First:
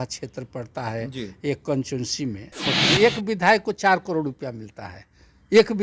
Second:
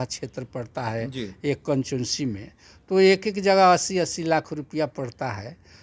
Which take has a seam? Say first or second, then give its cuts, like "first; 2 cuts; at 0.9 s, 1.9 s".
first; 1 cut; at 2.7 s